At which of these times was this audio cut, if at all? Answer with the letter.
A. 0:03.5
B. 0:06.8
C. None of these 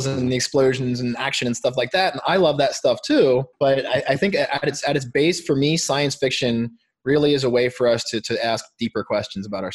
A